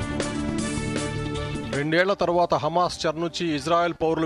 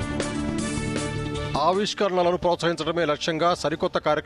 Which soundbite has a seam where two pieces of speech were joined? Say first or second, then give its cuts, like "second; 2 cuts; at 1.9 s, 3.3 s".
second; 1 cut; at 1.5 s